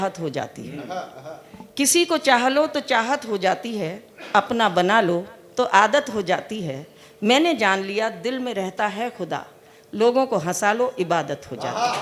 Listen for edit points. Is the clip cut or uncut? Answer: uncut